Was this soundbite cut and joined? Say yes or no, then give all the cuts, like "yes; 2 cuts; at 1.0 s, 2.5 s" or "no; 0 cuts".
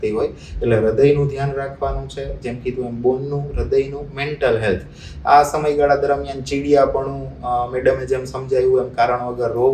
no; 0 cuts